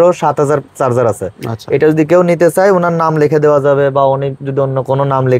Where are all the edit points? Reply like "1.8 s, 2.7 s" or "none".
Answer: none